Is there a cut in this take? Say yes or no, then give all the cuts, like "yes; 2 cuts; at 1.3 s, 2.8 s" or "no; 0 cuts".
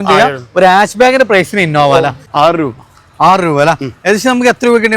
yes; 1 cut; at 2.2 s